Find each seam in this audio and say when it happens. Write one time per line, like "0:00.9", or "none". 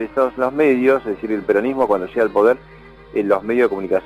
0:01.0